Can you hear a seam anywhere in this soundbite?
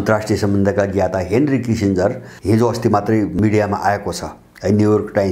yes; 2 cuts; at 2.3 s, 3.4 s

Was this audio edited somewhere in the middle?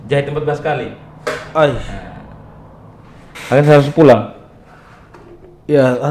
no; 0 cuts

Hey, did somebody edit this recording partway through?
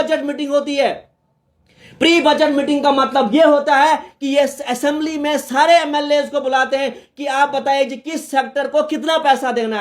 no; 0 cuts

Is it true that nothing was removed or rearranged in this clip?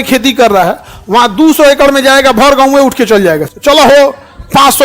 yes; 0 cuts

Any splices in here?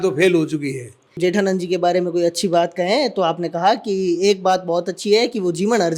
yes; 1 cut; at 1.2 s

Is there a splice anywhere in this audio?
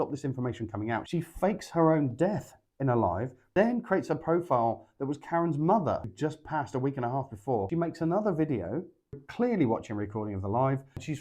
yes; 4 cuts; at 1.1 s, 3.4 s, 6.1 s, 7.7 s

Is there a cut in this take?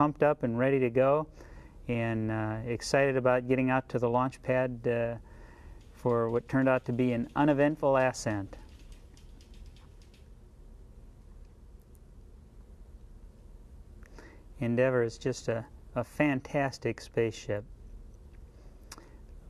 no; 0 cuts

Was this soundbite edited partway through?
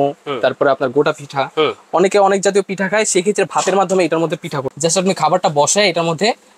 yes; 1 cut; at 4.7 s

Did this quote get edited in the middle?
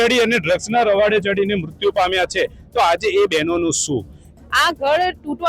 yes; 1 cut; at 4.3 s

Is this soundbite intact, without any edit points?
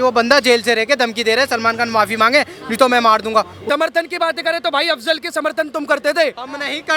no; 1 cut; at 3.6 s

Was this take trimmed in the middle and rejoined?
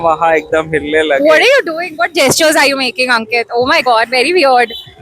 no; 0 cuts

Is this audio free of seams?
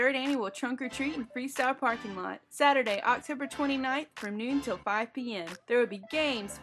yes; 0 cuts

